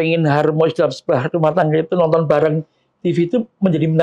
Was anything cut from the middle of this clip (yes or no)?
no